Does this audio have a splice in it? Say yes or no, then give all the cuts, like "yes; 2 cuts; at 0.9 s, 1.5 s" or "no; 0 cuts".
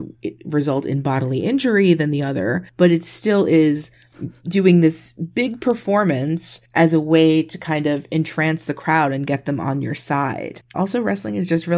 yes; 1 cut; at 10.7 s